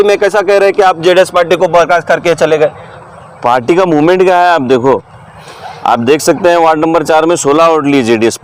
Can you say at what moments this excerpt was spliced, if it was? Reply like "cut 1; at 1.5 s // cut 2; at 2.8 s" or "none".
none